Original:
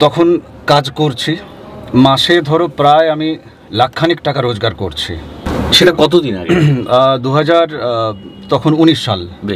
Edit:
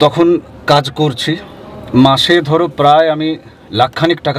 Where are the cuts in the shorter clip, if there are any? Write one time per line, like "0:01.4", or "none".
none